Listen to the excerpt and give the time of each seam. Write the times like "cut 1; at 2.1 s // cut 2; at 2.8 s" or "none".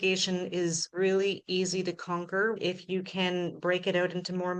cut 1; at 0.8 s // cut 2; at 2.6 s